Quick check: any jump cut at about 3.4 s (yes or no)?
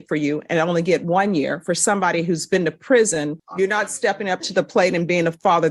yes